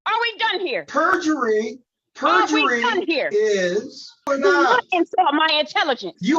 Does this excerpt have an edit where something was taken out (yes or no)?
yes